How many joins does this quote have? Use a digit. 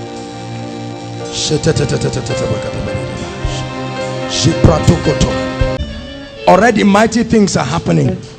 1